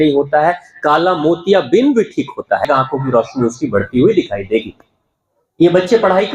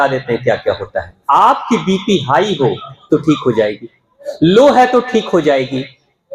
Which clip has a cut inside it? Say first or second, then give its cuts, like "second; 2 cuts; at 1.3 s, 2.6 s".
first; 1 cut; at 2.6 s